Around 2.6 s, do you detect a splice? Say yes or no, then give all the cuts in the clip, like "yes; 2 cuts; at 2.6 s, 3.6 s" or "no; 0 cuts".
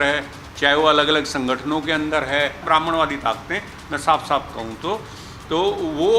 yes; 1 cut; at 2.6 s